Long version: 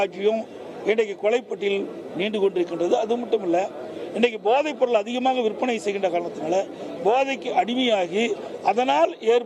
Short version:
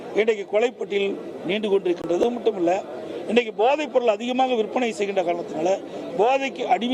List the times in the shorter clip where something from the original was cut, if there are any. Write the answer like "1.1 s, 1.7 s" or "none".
2.2 s